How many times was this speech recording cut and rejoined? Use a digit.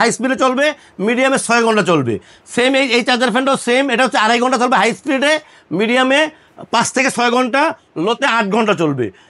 0